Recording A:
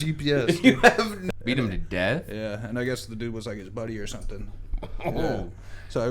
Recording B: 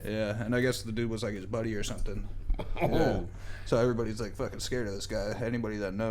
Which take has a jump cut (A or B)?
A